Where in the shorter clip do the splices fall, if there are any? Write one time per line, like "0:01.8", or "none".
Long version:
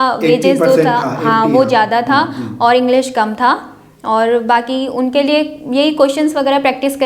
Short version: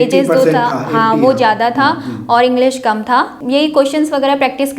0:03.4

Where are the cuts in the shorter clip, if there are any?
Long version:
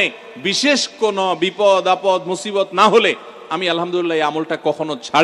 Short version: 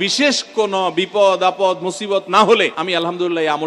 0:02.8

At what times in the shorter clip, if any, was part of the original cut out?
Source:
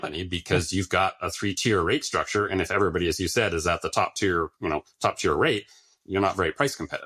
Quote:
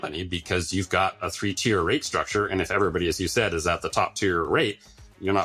0:04.5

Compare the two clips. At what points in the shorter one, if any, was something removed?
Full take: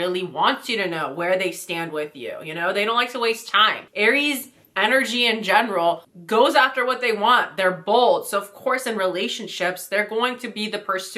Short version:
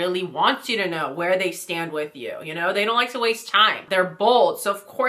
0:03.8

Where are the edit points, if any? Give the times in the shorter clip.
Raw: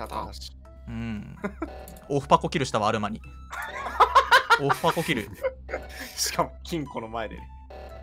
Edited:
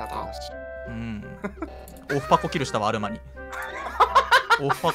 none

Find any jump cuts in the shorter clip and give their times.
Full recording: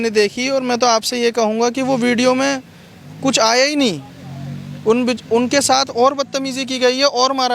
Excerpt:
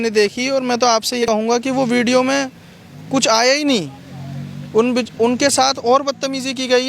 0:01.2

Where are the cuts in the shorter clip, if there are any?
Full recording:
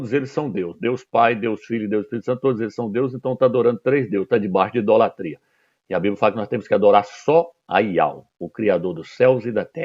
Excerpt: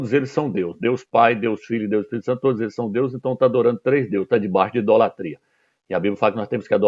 none

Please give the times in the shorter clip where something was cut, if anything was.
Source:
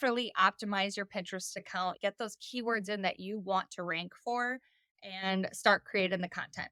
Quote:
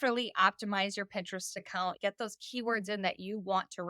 none

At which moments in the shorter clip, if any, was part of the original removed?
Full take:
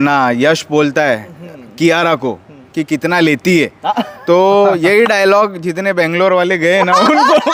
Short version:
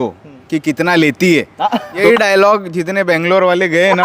0:02.0

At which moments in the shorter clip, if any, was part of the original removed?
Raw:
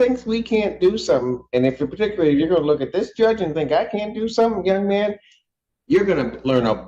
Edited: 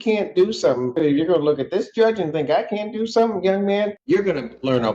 0:01.0
0:04.0

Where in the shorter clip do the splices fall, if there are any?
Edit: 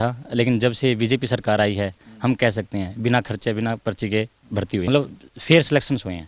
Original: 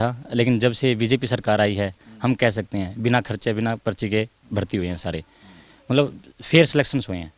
0:04.9

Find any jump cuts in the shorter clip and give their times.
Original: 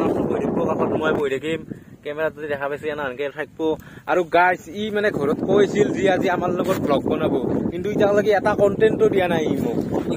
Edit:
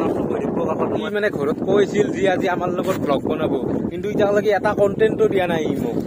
0:01.0

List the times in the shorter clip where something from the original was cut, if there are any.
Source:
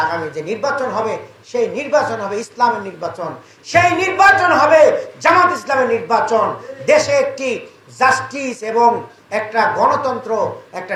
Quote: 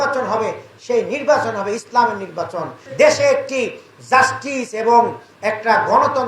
0:02.8

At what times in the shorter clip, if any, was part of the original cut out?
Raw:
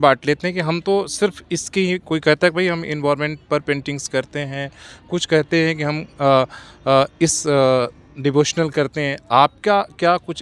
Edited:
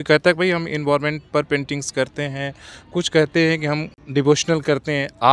0:03.9

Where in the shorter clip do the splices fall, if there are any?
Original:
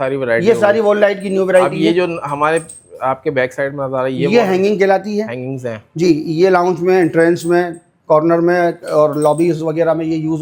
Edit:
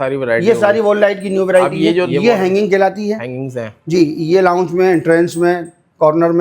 0:02.1

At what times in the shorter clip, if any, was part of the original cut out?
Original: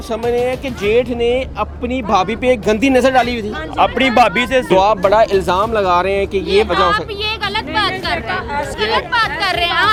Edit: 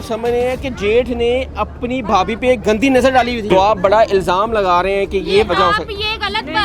0:03.5

